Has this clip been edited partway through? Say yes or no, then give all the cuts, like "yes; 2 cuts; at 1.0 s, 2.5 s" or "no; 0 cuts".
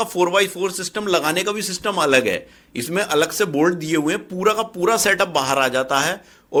no; 0 cuts